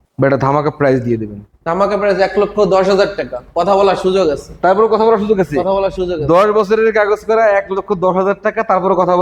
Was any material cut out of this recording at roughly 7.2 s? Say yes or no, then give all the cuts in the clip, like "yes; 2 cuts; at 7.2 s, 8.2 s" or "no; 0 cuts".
no; 0 cuts